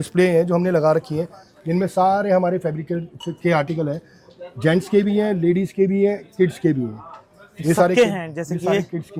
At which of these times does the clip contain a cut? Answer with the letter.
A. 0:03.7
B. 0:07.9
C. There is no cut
C